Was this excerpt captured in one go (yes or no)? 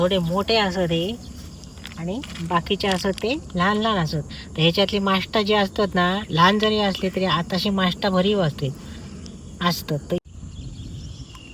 no